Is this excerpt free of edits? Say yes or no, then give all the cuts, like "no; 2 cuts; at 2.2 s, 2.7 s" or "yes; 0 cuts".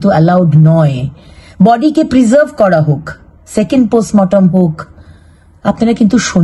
yes; 0 cuts